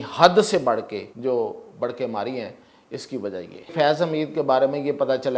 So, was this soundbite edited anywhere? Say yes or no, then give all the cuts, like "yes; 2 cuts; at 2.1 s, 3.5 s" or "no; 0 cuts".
yes; 2 cuts; at 1.0 s, 3.7 s